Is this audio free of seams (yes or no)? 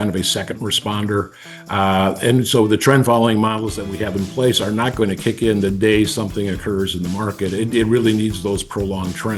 yes